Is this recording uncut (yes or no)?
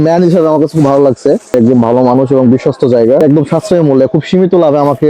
no